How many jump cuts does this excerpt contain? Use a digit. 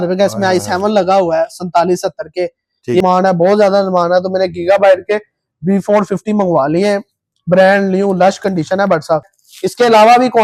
2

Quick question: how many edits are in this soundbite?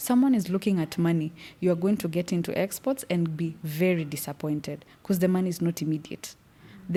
0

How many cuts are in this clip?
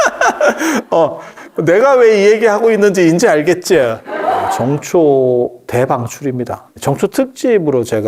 2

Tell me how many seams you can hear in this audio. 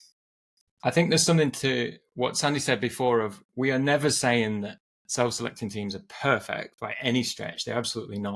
0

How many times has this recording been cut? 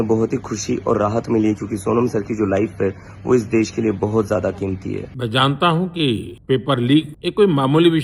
3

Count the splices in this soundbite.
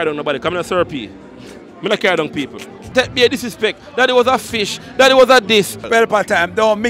2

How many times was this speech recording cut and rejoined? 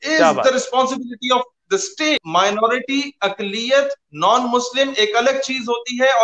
1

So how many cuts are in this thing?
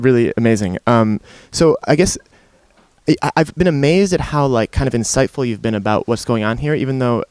1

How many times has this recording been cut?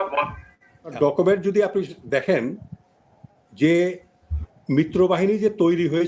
0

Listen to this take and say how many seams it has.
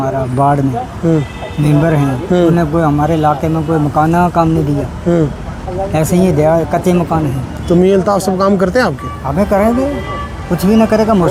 0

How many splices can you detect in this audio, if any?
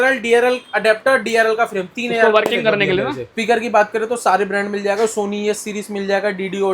1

